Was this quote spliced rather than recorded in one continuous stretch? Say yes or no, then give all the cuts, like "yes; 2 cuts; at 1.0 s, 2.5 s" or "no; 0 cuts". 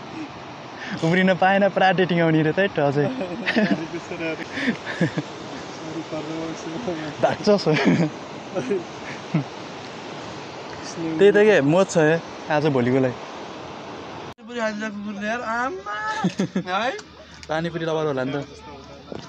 yes; 2 cuts; at 4.4 s, 14.4 s